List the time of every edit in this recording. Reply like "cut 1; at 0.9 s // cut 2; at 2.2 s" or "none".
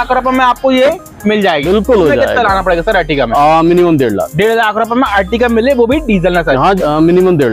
cut 1; at 1.6 s // cut 2; at 6.8 s